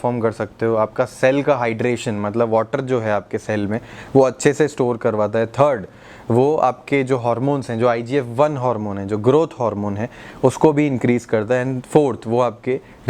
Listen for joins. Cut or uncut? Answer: uncut